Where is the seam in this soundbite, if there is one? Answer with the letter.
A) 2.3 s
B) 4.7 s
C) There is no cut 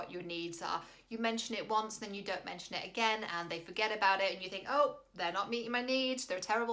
C